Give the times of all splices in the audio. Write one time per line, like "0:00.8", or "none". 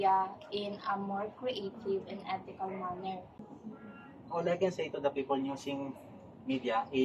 0:03.5